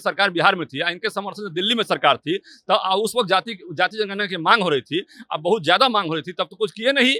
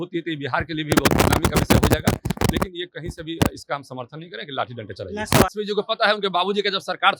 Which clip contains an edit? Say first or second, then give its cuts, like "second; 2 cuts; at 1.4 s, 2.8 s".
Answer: second; 1 cut; at 5.5 s